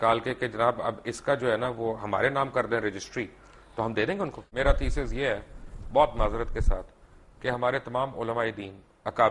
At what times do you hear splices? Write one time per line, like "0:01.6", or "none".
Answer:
0:04.4